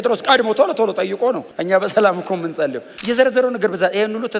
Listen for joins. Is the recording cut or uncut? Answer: cut